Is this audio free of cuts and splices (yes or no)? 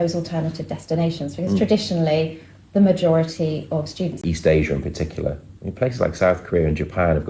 no